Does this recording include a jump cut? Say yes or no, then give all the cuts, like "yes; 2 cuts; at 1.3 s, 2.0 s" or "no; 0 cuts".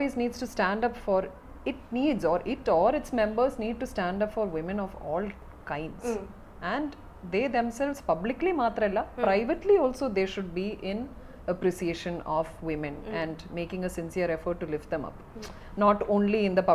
no; 0 cuts